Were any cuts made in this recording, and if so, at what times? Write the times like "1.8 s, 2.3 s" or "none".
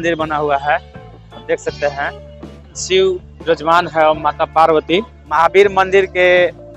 2.8 s, 5.2 s